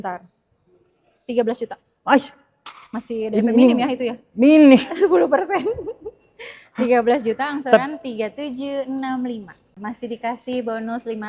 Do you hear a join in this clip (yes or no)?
yes